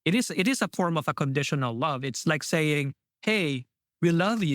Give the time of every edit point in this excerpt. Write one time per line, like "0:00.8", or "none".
none